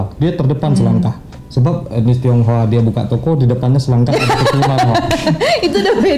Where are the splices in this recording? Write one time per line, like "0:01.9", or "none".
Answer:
none